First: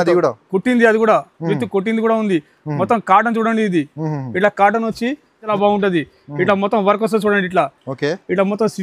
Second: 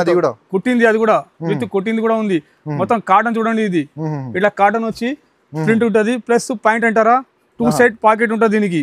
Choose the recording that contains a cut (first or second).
first